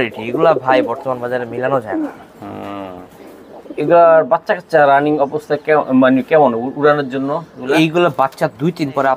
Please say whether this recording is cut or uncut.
uncut